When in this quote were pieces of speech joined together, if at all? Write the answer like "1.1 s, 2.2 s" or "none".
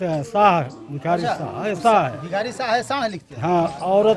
none